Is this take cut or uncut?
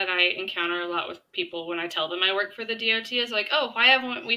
uncut